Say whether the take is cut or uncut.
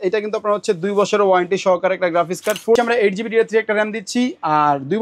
cut